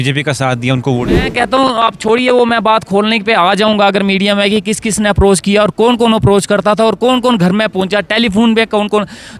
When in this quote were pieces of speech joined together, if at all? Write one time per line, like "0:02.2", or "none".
0:01.2

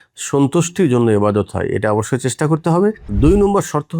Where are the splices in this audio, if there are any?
0:03.1

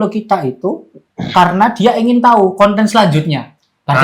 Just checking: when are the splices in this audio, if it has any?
none

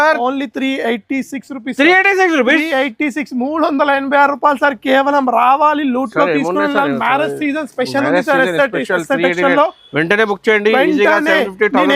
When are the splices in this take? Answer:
none

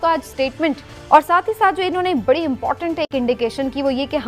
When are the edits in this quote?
0:00.9

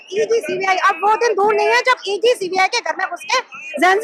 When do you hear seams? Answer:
none

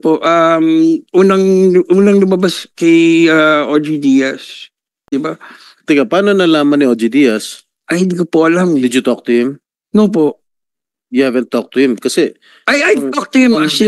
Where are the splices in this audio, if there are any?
0:05.1

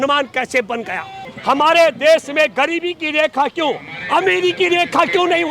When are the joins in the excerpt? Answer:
0:01.3

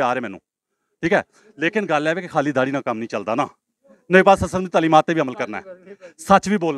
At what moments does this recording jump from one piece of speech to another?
none

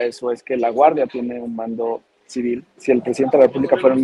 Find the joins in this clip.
0:02.8

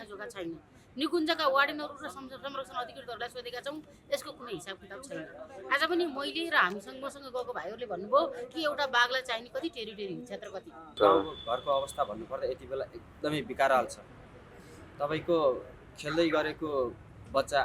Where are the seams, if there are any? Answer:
0:11.0

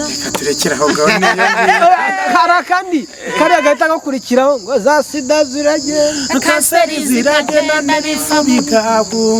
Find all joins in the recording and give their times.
none

